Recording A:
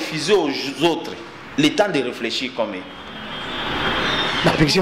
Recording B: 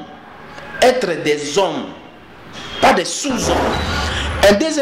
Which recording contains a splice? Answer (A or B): B